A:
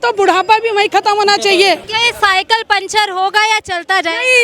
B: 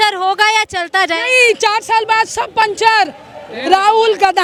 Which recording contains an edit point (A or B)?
A